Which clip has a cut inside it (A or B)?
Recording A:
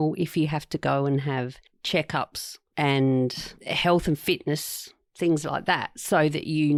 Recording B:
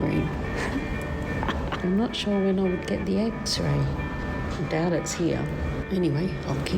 B